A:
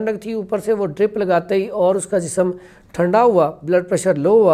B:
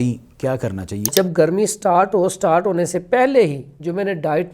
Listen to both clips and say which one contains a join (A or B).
B